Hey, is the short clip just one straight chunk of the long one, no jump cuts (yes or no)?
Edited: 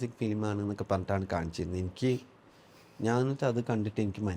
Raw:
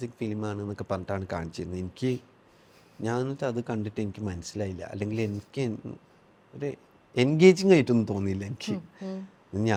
yes